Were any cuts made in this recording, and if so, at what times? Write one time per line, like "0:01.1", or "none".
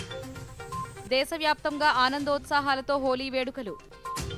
0:01.0